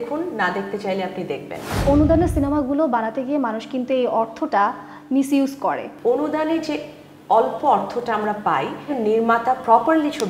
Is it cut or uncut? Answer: cut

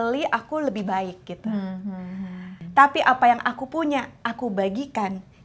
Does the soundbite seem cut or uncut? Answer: cut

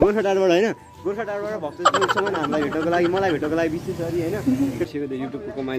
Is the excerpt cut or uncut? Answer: cut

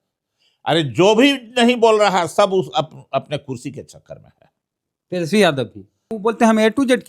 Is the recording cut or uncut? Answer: cut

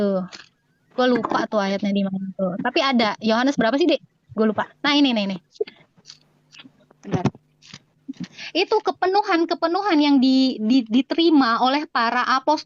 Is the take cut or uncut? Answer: uncut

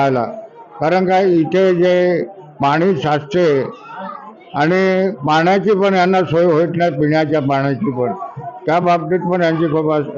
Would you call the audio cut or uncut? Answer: uncut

